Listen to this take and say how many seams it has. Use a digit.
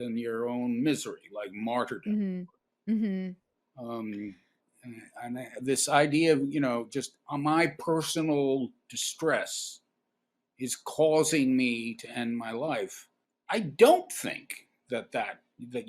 0